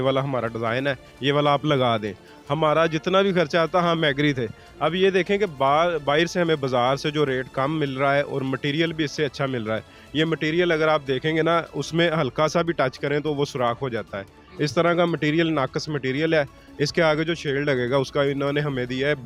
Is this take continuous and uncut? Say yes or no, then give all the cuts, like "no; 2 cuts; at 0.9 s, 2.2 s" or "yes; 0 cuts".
yes; 0 cuts